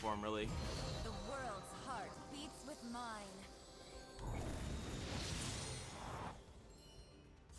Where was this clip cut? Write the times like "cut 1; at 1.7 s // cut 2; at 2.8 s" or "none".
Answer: none